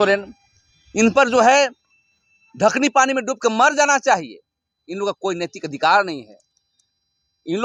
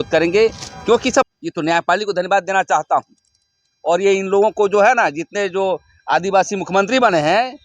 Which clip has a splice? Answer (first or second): second